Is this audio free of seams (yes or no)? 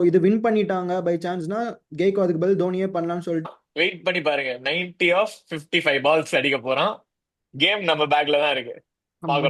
no